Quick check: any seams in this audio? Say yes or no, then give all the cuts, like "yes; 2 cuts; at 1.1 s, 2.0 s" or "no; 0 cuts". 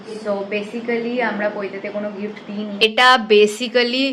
yes; 1 cut; at 2.8 s